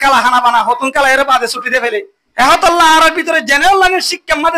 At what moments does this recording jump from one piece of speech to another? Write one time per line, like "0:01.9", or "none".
0:02.2